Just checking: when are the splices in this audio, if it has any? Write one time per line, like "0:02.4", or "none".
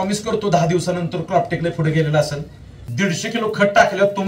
0:02.9